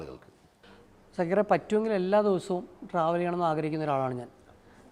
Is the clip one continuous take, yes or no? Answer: no